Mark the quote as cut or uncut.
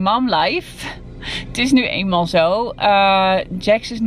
uncut